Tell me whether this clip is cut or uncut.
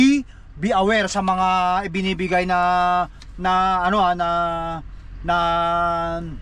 uncut